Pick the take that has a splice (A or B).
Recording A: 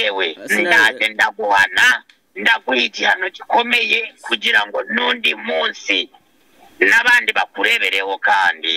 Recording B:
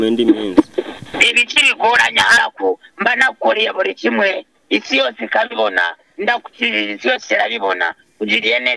B